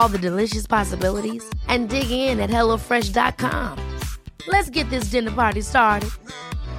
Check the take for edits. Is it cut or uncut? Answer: uncut